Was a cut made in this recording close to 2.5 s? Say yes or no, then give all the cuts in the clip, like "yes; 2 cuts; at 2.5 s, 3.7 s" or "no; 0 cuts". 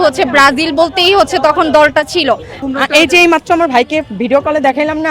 yes; 1 cut; at 2.5 s